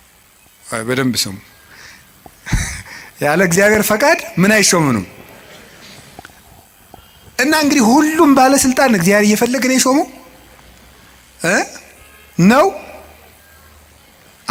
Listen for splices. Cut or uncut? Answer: uncut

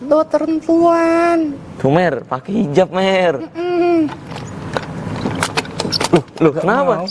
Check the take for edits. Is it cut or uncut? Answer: uncut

